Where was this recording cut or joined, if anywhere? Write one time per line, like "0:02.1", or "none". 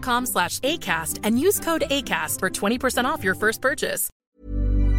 0:04.1